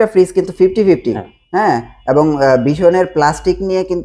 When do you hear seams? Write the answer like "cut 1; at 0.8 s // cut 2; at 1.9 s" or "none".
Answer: none